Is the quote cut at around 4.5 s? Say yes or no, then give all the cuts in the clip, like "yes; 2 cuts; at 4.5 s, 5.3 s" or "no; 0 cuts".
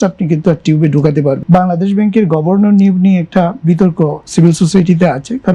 no; 1 cut; at 1.4 s